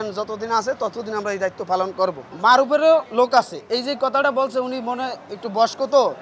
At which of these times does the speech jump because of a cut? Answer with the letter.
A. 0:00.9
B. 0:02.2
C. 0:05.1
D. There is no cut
D